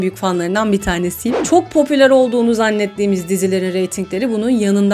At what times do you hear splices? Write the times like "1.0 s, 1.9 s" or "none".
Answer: 1.4 s